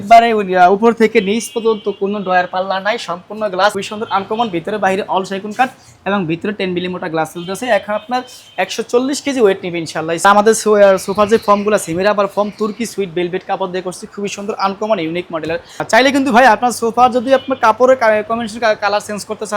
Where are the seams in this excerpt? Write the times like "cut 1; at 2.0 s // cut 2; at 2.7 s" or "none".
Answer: cut 1; at 3.8 s // cut 2; at 10.2 s // cut 3; at 15.8 s